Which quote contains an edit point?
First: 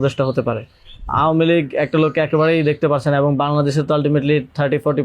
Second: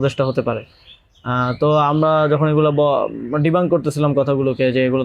first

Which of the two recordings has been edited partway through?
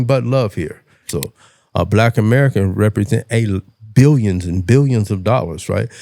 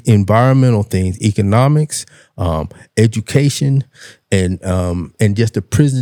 first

